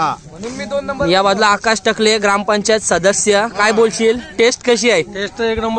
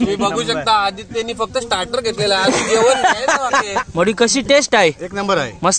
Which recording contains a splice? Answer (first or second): second